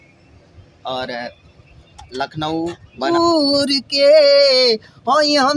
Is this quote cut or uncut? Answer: cut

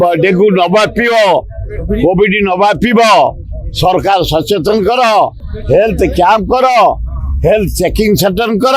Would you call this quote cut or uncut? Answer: uncut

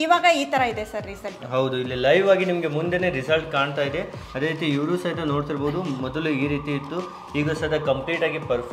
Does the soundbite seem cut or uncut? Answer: uncut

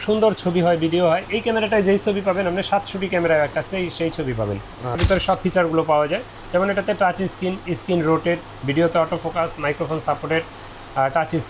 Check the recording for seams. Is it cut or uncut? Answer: cut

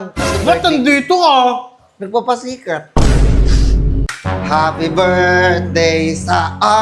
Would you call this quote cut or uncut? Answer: cut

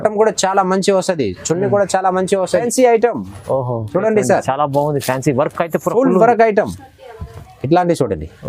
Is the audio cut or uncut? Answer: cut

